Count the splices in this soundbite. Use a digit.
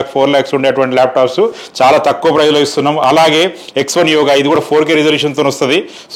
0